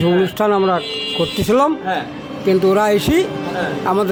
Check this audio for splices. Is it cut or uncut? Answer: uncut